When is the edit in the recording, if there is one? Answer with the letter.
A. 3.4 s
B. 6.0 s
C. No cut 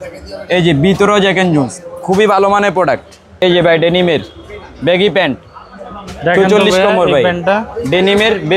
A